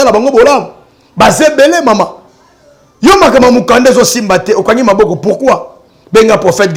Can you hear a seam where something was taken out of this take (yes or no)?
no